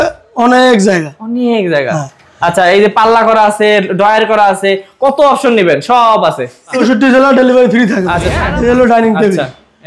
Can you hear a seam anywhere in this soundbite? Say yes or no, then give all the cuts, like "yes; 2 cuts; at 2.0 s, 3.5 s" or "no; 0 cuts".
yes; 2 cuts; at 6.6 s, 8.4 s